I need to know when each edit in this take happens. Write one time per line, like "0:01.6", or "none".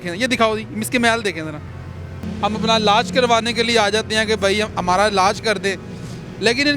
0:02.2